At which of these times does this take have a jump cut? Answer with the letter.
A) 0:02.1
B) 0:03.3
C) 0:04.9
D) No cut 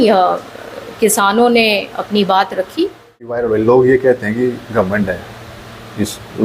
B